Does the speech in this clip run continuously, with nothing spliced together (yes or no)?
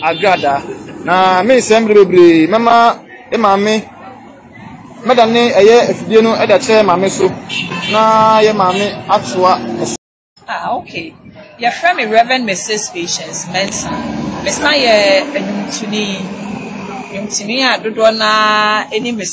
no